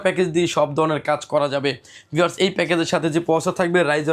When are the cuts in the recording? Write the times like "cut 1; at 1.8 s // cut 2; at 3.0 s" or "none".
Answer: none